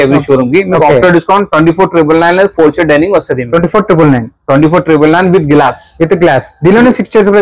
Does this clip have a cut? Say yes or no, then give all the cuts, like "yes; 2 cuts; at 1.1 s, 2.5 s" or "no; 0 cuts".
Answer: no; 0 cuts